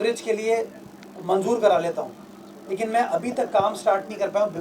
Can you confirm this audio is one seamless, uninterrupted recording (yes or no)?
yes